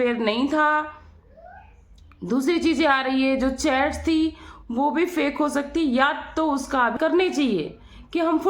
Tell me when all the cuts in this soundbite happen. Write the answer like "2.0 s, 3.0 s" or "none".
6.9 s